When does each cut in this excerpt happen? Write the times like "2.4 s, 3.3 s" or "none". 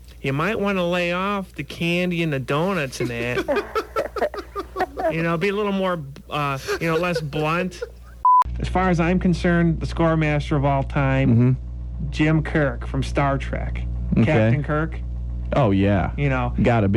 8.3 s